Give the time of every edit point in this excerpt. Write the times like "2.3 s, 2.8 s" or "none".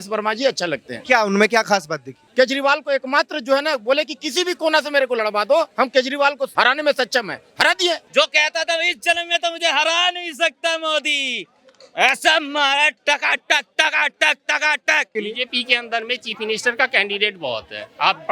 2.2 s, 6.0 s, 8.0 s, 15.1 s